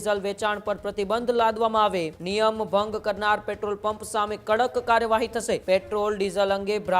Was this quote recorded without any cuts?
no; 2 cuts; at 2.2 s, 5.6 s

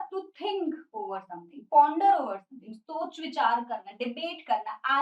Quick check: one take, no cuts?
yes; 0 cuts

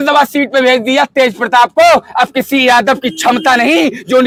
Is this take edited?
no; 0 cuts

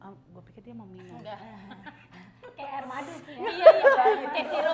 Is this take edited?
no; 0 cuts

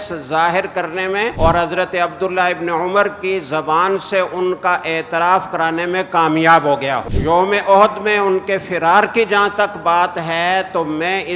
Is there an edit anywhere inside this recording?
yes; 2 cuts; at 1.3 s, 7.1 s

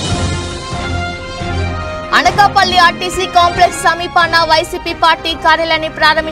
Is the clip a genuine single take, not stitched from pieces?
no; 1 cut; at 1.8 s

